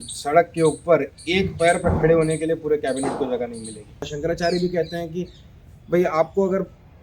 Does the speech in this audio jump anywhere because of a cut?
yes; 1 cut; at 4.1 s

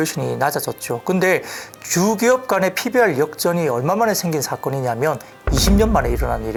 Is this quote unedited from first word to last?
yes; 0 cuts

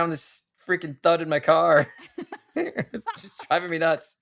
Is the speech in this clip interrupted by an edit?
no; 0 cuts

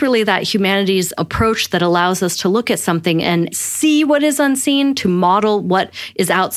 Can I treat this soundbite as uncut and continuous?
no; 2 cuts; at 1.1 s, 3.5 s

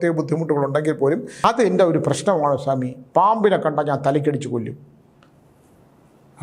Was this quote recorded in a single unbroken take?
no; 1 cut; at 1.4 s

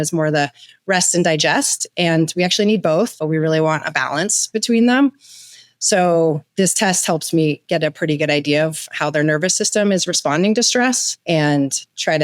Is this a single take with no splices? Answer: no; 2 cuts; at 3.1 s, 11.1 s

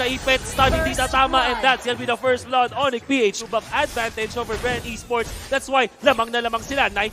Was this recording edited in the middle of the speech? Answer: yes; 1 cut; at 3.4 s

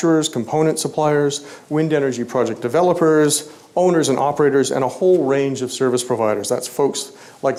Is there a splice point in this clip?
no; 0 cuts

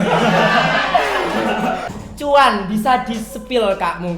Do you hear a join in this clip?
yes; 1 cut; at 1.9 s

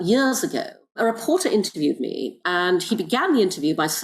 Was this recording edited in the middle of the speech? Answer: yes; 2 cuts; at 1.0 s, 2.4 s

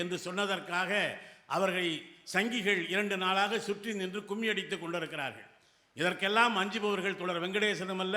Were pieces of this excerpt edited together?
no; 0 cuts

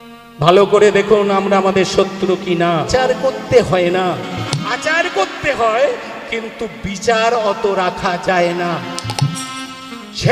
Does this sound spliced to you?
yes; 1 cut; at 2.9 s

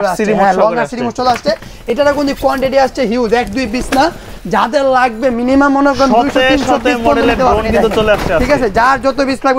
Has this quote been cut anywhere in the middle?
no; 0 cuts

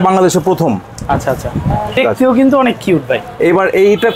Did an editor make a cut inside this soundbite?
yes; 1 cut; at 2.0 s

